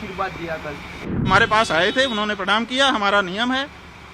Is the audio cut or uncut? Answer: cut